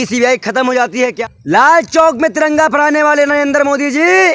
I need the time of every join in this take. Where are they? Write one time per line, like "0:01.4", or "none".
0:01.3